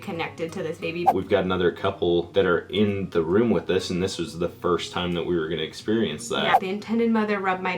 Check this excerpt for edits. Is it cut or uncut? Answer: cut